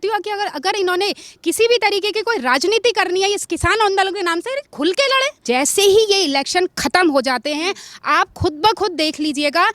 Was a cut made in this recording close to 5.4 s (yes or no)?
yes